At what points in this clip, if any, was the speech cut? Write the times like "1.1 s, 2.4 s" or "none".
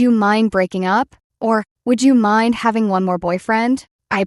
1.2 s

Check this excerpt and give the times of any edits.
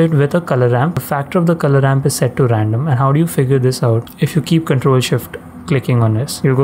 1.0 s

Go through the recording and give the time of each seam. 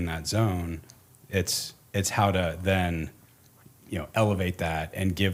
none

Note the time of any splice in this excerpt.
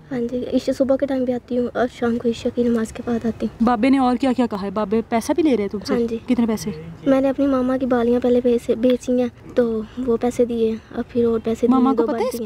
3.5 s, 9.4 s

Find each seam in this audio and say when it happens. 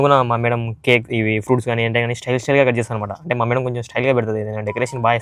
none

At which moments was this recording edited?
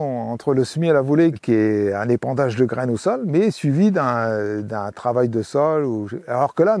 1.4 s

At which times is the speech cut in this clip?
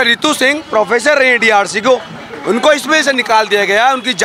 none

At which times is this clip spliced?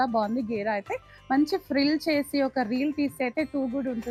none

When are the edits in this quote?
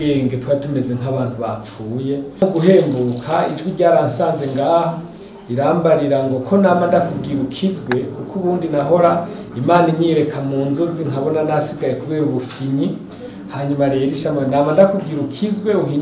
2.4 s

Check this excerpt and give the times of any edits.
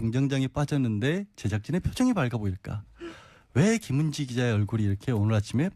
2.8 s

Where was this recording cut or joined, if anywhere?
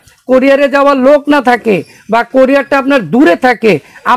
none

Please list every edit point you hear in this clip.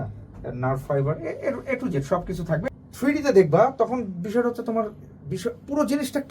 2.7 s

